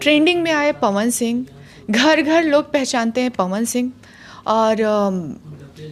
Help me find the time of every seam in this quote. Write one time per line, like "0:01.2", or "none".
none